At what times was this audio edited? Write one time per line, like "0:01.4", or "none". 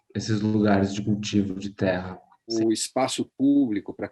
0:02.5